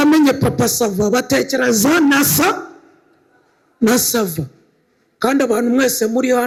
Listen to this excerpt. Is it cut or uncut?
uncut